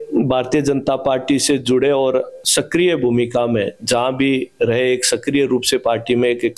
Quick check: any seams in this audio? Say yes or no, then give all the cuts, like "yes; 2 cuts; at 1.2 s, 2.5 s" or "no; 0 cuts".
no; 0 cuts